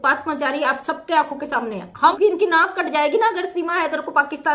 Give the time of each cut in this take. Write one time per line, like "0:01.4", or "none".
0:02.2

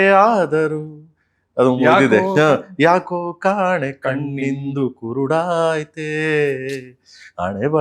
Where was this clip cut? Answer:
none

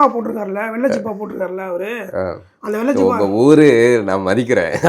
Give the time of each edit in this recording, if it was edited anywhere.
none

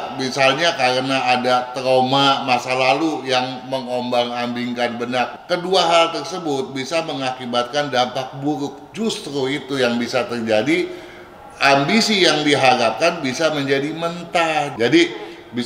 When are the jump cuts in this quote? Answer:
0:05.4
0:14.7

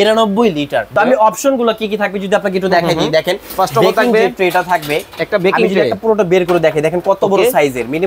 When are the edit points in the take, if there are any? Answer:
0:00.9

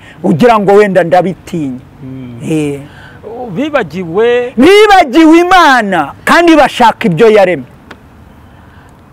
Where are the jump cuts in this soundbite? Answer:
none

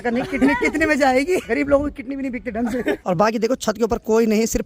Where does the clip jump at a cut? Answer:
0:01.4
0:03.0

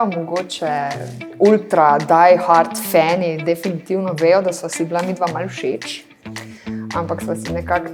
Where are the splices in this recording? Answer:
0:01.2

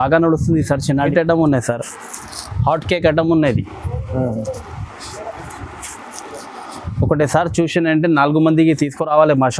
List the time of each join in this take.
0:01.1

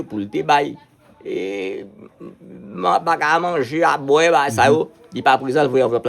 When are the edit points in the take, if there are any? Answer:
none

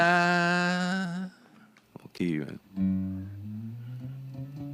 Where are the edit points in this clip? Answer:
none

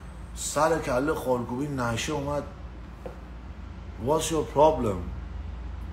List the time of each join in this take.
none

